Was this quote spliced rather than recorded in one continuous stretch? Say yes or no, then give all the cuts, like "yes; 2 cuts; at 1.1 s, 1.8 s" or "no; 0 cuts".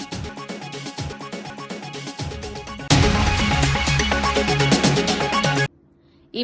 no; 0 cuts